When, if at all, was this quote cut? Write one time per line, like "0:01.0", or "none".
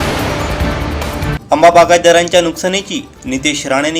0:01.2